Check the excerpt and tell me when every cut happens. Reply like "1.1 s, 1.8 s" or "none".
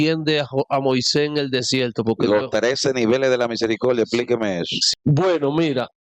4.7 s